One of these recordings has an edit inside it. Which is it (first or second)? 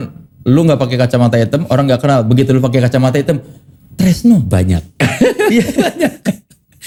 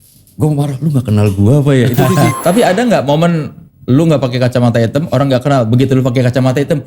second